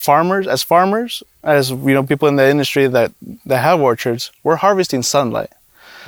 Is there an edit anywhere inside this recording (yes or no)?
no